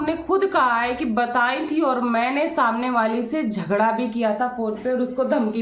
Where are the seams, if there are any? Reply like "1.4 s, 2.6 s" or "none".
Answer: none